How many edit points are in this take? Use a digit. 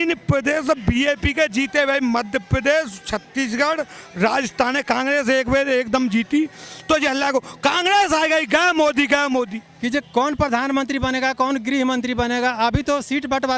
1